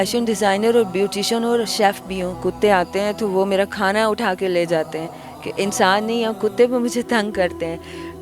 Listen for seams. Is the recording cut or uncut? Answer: cut